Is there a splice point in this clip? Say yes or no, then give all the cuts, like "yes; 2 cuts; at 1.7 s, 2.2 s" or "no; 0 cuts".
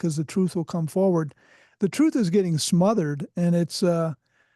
no; 0 cuts